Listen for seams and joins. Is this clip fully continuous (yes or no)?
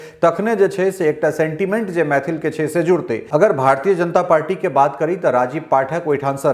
no